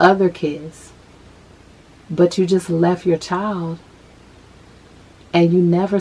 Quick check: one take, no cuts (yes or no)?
yes